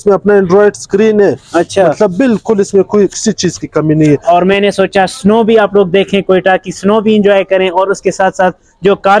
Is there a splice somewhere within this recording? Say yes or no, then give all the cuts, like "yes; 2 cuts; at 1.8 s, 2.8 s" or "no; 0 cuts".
yes; 1 cut; at 4.2 s